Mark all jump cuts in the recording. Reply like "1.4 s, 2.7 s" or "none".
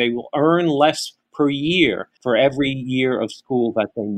2.1 s